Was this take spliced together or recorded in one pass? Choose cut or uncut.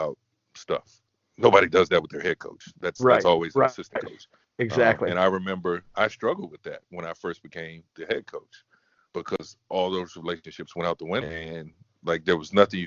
uncut